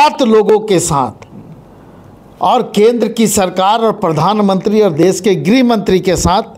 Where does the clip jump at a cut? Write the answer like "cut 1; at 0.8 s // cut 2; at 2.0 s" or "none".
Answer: none